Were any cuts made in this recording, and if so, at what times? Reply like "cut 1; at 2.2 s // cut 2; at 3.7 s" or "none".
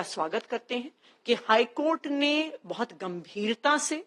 none